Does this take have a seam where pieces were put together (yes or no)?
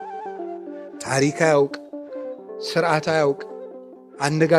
yes